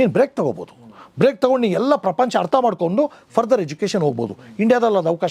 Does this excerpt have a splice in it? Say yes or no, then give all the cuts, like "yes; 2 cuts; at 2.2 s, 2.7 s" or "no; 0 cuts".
no; 0 cuts